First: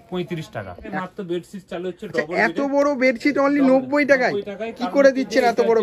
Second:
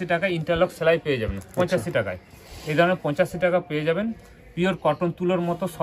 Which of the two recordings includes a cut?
first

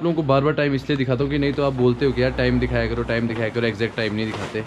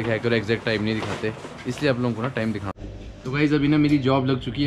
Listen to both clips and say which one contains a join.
second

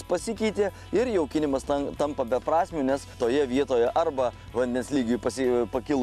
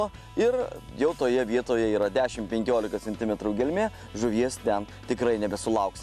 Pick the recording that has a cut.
first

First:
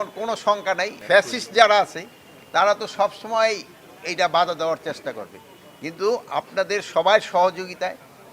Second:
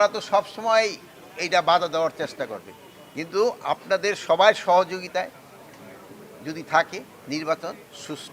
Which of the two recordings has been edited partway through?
first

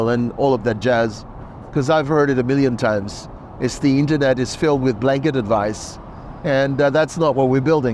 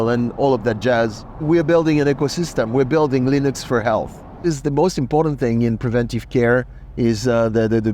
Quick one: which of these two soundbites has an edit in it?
second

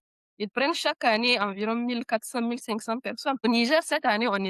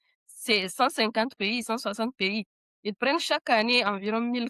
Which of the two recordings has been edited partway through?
first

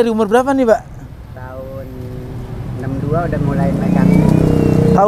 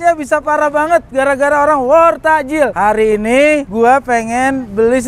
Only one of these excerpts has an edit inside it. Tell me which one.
second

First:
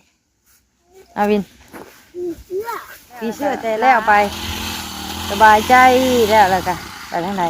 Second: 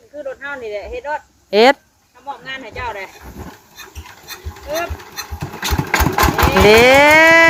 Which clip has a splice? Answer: first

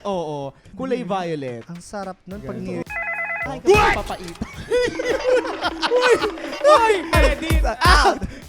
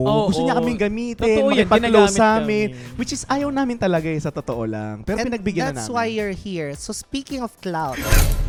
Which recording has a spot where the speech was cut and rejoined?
first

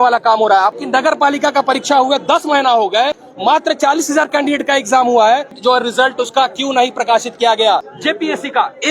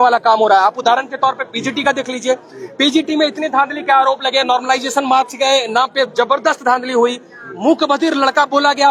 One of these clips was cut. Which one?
first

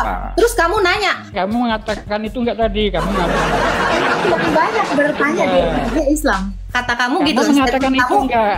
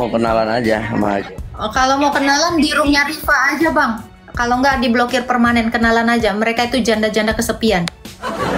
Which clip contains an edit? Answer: first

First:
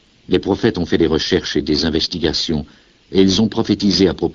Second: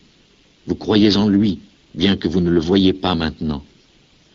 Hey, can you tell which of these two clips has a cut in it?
second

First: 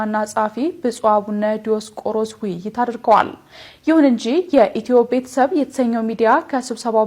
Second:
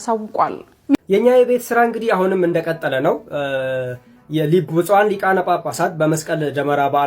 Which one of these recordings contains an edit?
second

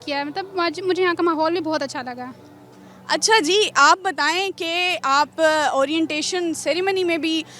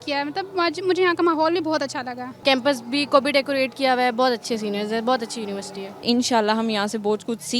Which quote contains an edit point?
second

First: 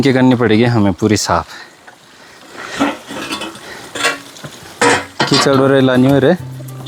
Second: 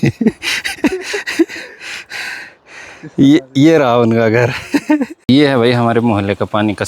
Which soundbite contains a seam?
second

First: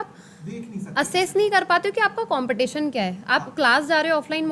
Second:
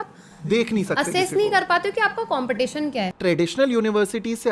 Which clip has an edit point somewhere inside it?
second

